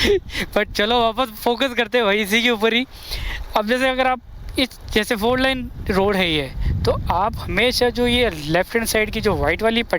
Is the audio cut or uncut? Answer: uncut